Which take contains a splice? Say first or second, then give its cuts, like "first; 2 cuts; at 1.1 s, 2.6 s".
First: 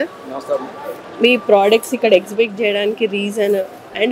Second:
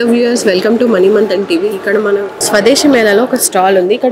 second; 1 cut; at 2.4 s